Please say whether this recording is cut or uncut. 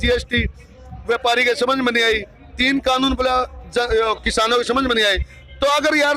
uncut